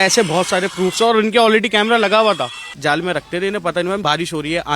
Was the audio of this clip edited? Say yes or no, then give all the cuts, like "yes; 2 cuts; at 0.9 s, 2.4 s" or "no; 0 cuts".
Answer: yes; 2 cuts; at 2.6 s, 4.0 s